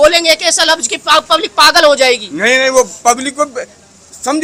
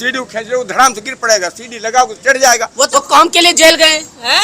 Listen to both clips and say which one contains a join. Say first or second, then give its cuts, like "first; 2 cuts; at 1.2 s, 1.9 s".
second; 1 cut; at 2.9 s